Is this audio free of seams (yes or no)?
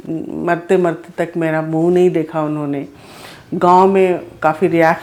yes